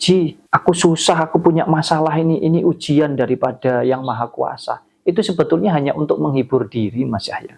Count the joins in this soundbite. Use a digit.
0